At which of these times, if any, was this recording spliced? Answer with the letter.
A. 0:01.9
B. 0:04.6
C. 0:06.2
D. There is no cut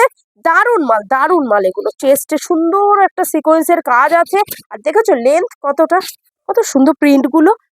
C